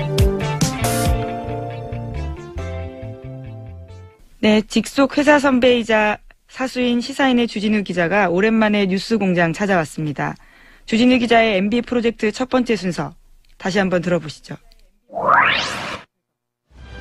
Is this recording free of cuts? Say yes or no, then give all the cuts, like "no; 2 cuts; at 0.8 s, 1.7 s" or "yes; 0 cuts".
yes; 0 cuts